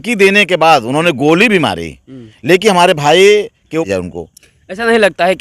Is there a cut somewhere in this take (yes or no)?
yes